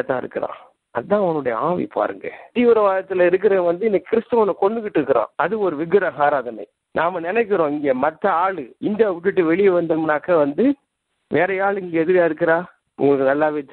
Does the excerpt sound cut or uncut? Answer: cut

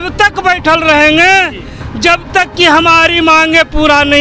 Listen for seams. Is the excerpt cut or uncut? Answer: uncut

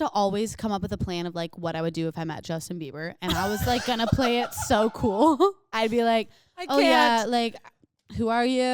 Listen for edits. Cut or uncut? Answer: uncut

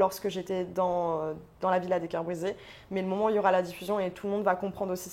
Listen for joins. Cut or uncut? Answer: uncut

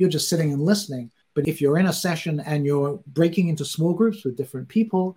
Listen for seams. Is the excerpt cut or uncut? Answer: uncut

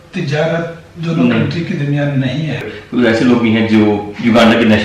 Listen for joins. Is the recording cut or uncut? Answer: cut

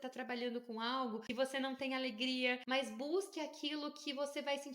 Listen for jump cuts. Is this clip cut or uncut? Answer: cut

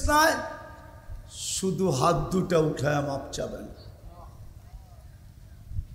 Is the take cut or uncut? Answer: uncut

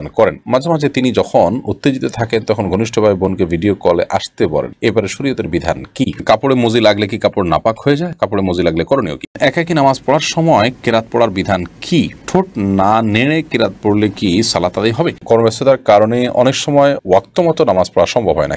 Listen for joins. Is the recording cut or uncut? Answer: cut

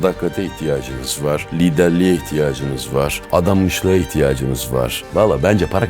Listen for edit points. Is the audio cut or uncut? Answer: cut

